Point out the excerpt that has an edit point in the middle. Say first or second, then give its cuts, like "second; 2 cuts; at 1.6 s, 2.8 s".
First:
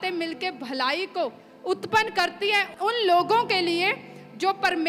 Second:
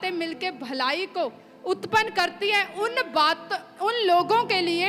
first; 1 cut; at 2.7 s